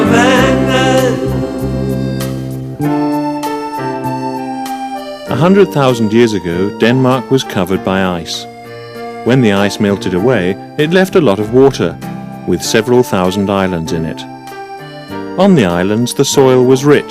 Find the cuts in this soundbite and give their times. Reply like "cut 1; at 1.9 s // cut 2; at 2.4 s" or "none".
cut 1; at 11.8 s

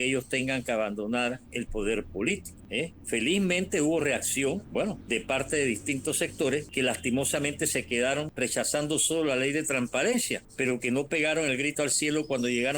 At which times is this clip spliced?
cut 1; at 2.6 s // cut 2; at 4.8 s // cut 3; at 6.7 s // cut 4; at 8.3 s // cut 5; at 10.4 s

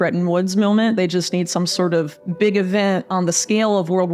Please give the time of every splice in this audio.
cut 1; at 2.2 s

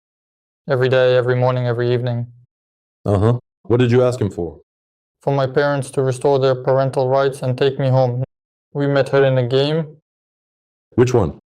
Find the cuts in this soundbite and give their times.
cut 1; at 8.6 s

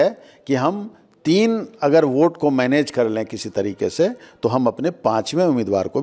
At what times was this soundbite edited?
none

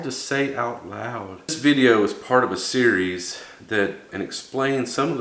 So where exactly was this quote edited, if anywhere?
cut 1; at 1.6 s // cut 2; at 4.1 s

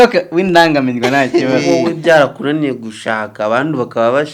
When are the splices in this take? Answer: cut 1; at 1.7 s

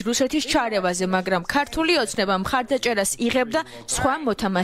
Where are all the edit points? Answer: none

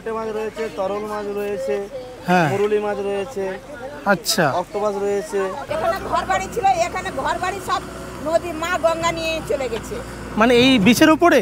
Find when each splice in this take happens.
cut 1; at 5.7 s

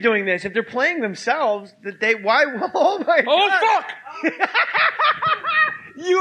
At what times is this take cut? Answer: cut 1; at 3.0 s

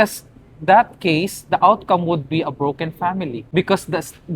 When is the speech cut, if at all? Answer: cut 1; at 3.4 s

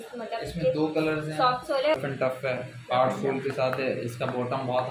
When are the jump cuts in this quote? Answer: cut 1; at 2.0 s

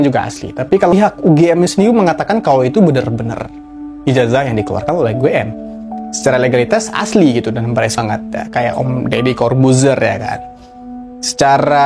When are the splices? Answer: cut 1; at 0.9 s // cut 2; at 8.0 s

